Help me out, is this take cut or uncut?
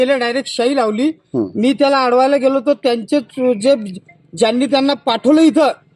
uncut